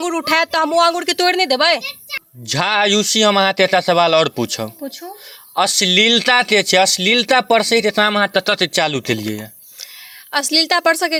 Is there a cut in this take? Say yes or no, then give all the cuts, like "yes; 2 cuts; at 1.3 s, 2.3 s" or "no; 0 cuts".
no; 0 cuts